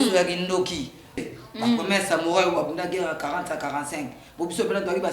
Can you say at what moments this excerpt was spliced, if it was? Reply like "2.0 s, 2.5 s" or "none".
1.2 s